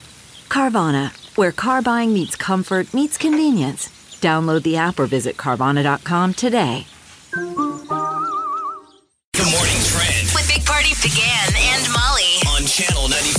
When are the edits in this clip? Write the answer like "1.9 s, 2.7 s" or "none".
9.3 s